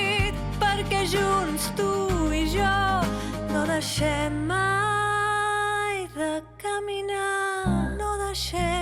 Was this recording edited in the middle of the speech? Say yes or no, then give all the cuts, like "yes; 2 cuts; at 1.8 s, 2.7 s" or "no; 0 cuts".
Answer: no; 0 cuts